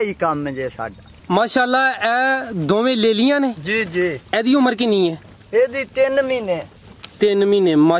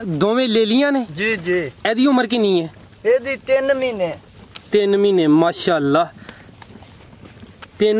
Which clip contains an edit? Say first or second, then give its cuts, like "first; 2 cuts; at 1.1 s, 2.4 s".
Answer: first; 1 cut; at 1.2 s